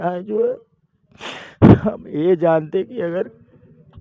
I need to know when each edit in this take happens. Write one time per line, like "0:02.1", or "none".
none

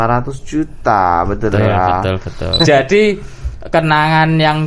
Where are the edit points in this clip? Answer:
0:02.4

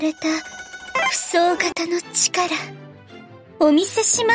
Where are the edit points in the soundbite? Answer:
none

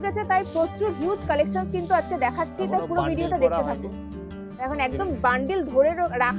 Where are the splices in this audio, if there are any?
none

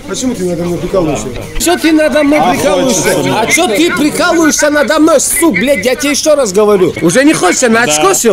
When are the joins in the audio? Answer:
0:01.6
0:07.0

